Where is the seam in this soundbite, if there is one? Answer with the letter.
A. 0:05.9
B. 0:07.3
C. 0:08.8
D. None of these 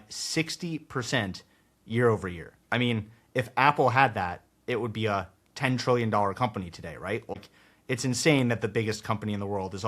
B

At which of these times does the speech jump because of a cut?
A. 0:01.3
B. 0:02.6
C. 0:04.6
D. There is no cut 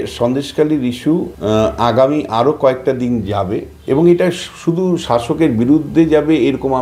A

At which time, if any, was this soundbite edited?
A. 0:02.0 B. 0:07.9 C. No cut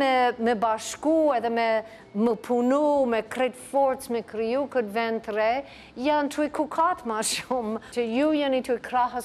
B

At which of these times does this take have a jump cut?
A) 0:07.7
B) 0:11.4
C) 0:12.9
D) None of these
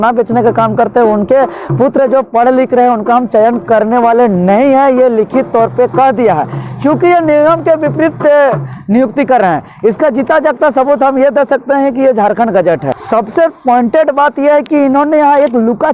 C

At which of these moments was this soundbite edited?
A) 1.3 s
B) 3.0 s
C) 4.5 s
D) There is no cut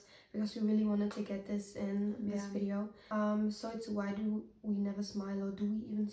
B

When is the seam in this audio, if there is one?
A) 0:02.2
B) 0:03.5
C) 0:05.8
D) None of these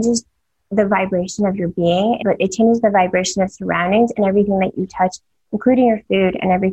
A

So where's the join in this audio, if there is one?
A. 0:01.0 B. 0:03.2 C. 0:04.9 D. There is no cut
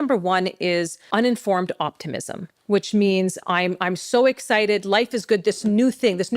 A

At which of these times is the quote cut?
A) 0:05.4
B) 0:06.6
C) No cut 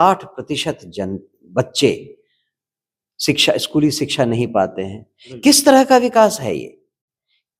C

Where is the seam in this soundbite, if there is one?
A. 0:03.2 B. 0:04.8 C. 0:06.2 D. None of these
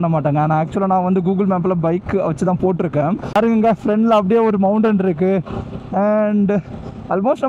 A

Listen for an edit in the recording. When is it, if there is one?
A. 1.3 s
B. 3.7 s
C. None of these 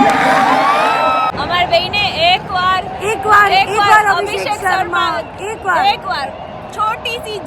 A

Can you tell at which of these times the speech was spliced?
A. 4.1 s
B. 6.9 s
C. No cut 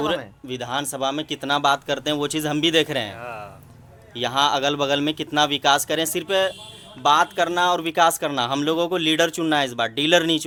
C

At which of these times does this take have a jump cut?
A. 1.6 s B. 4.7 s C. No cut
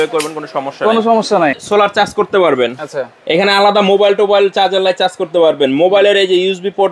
A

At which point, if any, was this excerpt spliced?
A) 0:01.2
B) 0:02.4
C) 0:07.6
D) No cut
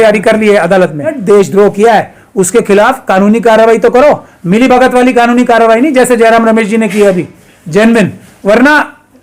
A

